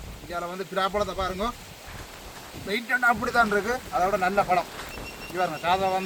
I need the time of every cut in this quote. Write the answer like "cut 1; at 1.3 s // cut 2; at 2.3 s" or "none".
none